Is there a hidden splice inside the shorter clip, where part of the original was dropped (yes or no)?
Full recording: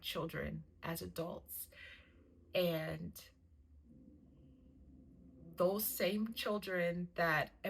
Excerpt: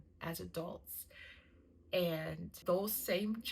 yes